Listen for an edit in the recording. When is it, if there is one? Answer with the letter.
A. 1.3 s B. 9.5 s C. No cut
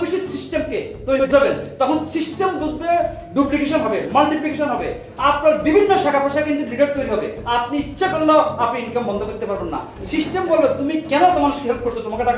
A